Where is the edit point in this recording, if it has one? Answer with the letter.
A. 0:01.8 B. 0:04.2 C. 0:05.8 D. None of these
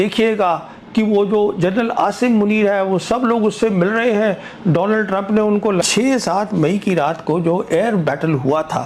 C